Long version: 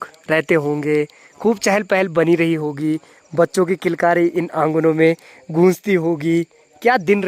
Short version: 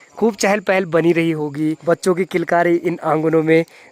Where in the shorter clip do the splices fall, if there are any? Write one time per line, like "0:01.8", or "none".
0:01.8